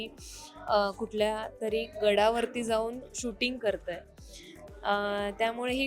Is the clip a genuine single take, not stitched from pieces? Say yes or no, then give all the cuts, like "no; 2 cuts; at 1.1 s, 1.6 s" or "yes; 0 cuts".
yes; 0 cuts